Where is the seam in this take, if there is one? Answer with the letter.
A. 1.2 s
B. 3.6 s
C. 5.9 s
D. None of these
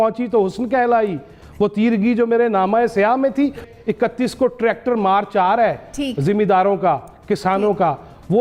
B